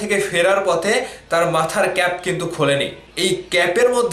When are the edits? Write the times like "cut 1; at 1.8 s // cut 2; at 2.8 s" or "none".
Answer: cut 1; at 3.0 s